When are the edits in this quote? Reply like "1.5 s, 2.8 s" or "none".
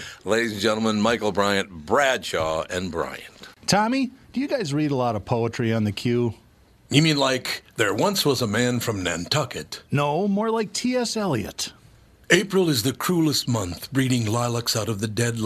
3.4 s